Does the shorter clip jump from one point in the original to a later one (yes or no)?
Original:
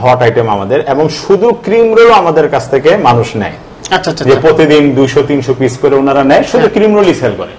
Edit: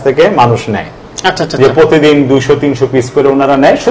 no